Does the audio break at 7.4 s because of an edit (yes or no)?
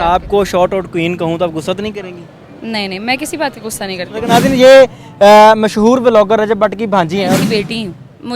yes